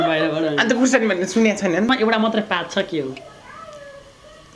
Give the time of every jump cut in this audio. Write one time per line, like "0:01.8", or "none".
0:01.9